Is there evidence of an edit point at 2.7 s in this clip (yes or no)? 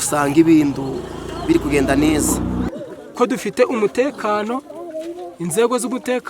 yes